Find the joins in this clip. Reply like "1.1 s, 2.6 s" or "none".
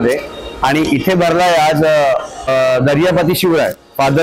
2.5 s